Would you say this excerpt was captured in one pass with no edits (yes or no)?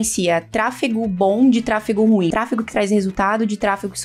no